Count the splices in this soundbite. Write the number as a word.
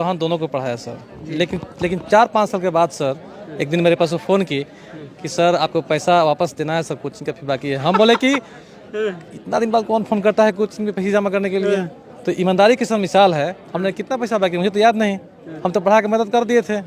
zero